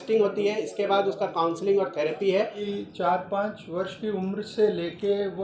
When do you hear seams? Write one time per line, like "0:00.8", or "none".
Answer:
0:02.6